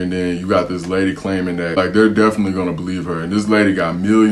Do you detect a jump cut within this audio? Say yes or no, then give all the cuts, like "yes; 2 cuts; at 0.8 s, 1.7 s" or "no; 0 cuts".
yes; 1 cut; at 1.8 s